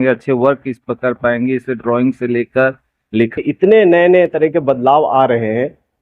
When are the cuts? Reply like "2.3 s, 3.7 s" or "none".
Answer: 3.4 s